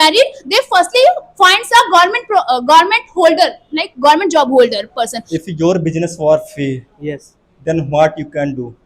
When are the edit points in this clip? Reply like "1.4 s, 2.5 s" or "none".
5.3 s